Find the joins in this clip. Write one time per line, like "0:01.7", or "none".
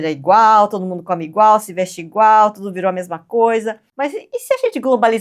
0:03.9